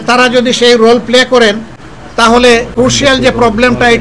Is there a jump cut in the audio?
yes; 1 cut; at 2.7 s

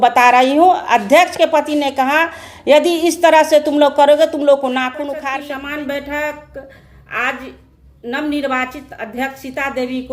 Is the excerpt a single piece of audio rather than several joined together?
no; 1 cut; at 5.2 s

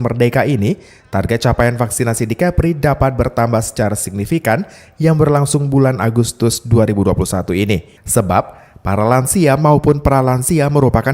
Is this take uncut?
no; 1 cut; at 8.0 s

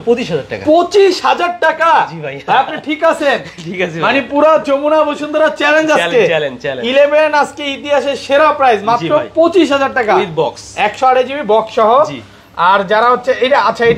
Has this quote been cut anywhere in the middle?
no; 0 cuts

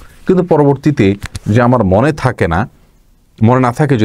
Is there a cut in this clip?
no; 0 cuts

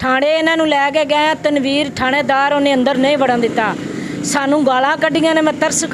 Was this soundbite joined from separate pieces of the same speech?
no; 0 cuts

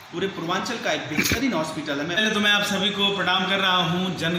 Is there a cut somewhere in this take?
yes; 1 cut; at 2.2 s

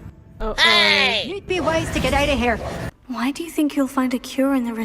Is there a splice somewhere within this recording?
yes; 1 cut; at 2.7 s

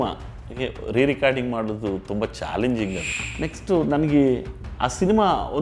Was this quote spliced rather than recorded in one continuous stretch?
yes; 1 cut; at 3.2 s

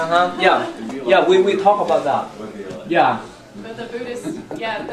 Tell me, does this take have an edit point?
yes; 1 cut; at 1.6 s

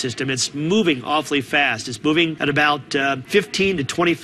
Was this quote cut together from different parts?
yes; 2 cuts; at 2.4 s, 3.2 s

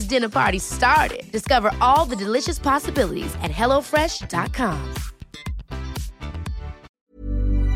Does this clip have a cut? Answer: yes; 1 cut; at 6.9 s

